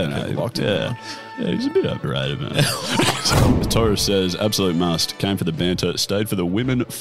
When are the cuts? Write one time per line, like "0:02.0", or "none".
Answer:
0:03.4